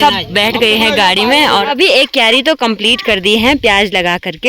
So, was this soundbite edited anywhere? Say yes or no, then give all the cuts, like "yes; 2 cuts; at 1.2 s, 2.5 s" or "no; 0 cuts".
yes; 1 cut; at 1.6 s